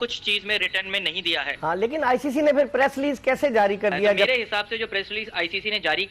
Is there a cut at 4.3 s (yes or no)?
yes